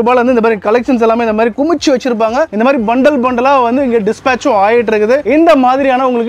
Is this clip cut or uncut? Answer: cut